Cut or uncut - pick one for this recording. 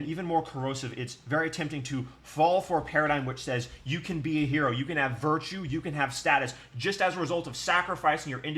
uncut